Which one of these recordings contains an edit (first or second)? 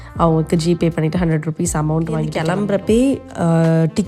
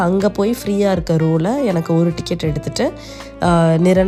first